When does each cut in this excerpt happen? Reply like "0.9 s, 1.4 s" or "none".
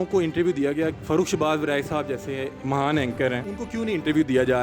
1.0 s, 2.5 s, 3.5 s